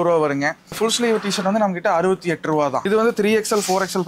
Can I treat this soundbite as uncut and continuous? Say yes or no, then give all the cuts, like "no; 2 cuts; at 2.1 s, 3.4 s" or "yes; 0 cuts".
no; 2 cuts; at 0.8 s, 2.8 s